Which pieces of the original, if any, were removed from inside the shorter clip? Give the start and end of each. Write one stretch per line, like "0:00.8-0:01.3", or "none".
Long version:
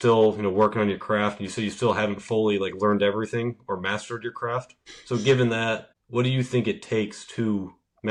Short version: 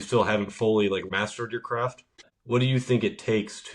0:02.7-0:03.8
0:05.0-0:05.9